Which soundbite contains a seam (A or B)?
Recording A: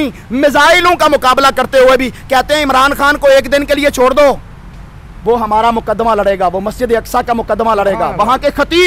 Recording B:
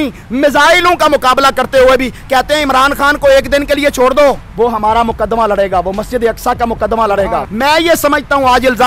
B